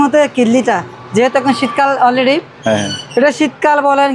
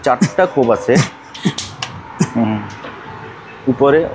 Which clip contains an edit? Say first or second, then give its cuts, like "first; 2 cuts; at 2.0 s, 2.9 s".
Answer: second; 1 cut; at 1.4 s